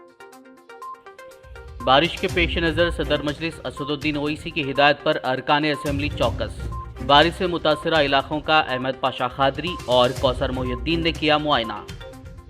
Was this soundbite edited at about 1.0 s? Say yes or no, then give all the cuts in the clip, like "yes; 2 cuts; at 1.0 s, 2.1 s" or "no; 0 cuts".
yes; 1 cut; at 1.0 s